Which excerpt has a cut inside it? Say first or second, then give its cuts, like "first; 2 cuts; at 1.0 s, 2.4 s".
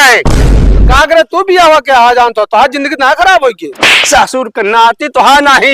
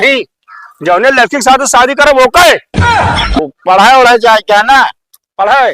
second; 1 cut; at 3.4 s